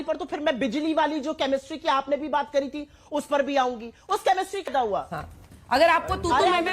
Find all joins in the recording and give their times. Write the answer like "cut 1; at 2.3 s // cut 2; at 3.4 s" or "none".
cut 1; at 4.7 s